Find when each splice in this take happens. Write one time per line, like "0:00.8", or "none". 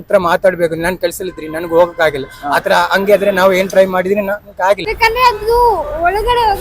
0:04.9